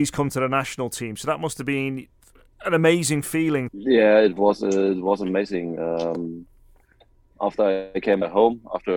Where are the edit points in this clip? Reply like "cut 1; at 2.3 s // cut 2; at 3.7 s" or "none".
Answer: cut 1; at 7.2 s